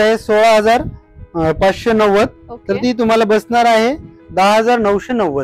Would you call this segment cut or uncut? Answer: uncut